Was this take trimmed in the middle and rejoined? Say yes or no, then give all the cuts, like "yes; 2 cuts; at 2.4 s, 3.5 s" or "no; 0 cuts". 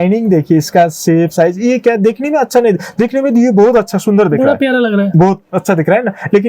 no; 0 cuts